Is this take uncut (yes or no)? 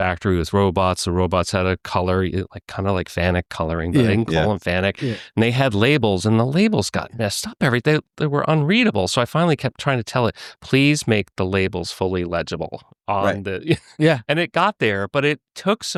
yes